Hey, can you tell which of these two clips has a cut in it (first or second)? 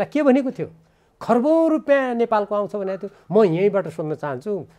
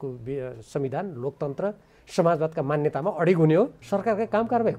second